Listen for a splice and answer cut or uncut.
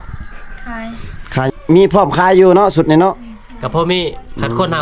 cut